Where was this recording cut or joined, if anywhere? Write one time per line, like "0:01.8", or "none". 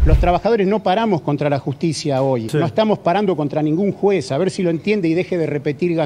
0:02.5